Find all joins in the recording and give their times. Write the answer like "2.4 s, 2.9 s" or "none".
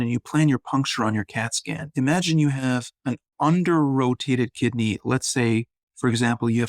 2.9 s